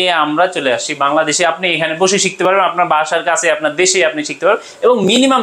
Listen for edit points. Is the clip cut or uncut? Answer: uncut